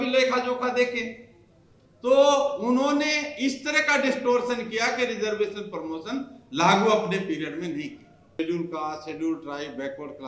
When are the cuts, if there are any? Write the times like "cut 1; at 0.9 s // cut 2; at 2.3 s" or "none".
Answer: cut 1; at 8.4 s

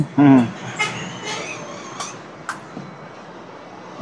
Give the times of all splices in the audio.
none

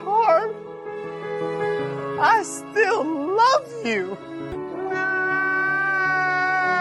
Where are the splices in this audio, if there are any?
cut 1; at 4.5 s

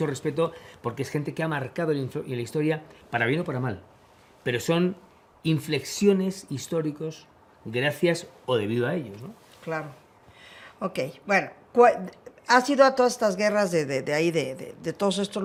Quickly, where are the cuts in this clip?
none

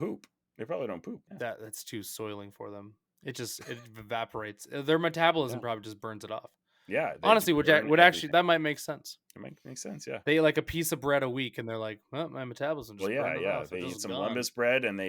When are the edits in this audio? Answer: cut 1; at 1.3 s // cut 2; at 8.2 s

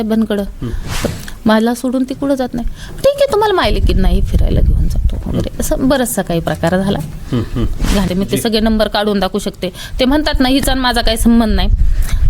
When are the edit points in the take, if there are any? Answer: cut 1; at 1.1 s // cut 2; at 8.1 s

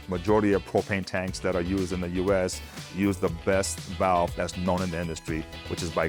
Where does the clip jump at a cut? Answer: none

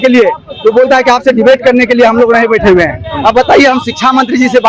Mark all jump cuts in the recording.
none

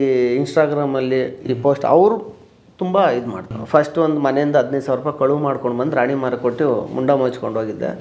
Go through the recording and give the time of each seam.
cut 1; at 3.5 s

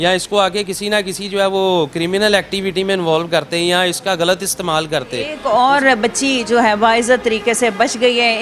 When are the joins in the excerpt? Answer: cut 1; at 5.3 s

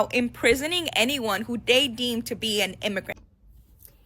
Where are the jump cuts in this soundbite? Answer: cut 1; at 3.1 s

